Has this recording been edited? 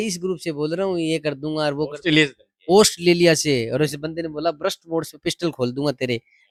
no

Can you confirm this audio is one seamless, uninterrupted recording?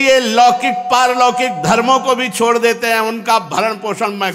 yes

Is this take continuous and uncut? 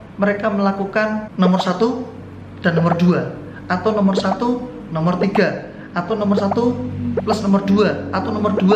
no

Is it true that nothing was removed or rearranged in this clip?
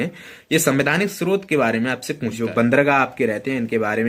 no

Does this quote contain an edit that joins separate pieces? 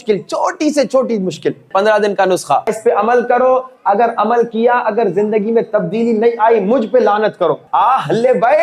yes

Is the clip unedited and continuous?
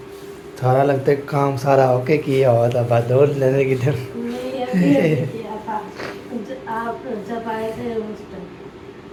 yes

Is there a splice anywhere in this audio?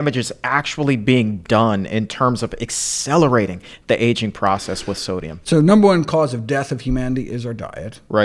yes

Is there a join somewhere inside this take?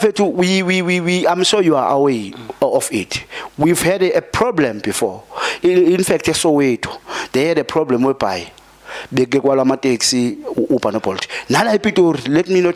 no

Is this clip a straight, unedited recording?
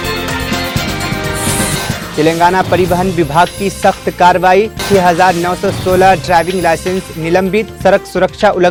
yes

